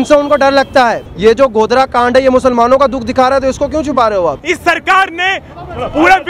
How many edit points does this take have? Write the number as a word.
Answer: two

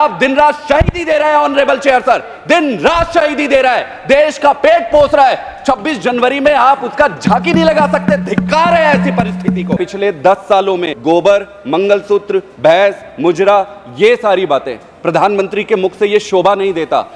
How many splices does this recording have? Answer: two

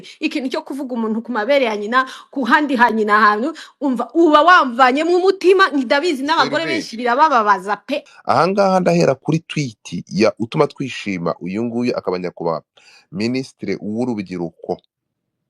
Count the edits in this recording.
one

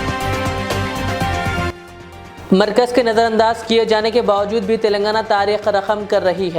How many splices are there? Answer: one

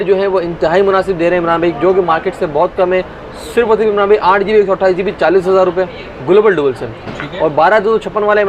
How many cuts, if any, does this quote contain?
zero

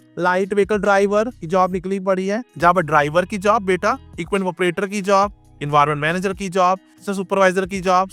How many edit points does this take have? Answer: two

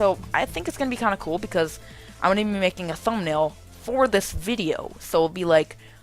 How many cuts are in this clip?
one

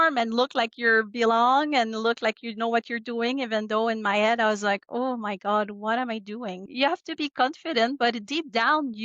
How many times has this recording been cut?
one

